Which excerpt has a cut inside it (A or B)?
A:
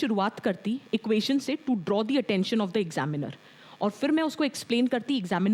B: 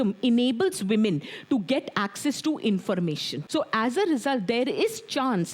B